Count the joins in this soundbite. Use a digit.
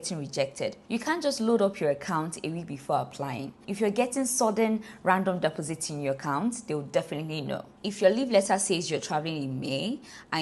3